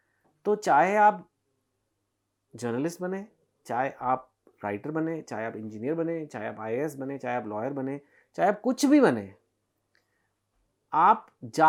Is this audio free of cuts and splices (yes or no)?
yes